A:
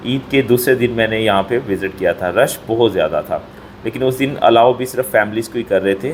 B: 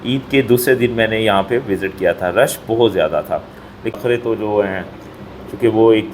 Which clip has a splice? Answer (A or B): B